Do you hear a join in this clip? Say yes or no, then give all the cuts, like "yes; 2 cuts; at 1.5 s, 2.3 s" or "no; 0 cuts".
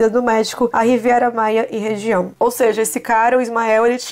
yes; 1 cut; at 2.3 s